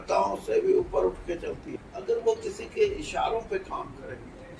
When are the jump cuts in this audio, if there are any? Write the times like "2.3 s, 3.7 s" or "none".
1.6 s